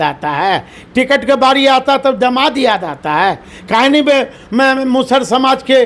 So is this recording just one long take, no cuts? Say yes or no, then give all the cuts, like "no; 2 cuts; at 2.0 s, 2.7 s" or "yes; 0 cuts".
yes; 0 cuts